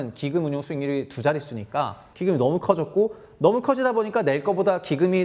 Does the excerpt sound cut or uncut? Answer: cut